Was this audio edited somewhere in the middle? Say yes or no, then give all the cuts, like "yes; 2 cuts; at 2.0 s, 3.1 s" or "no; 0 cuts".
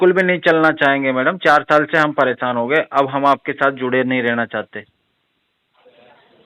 no; 0 cuts